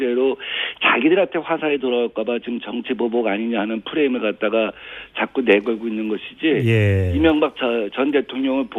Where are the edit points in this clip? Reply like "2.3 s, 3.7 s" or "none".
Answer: none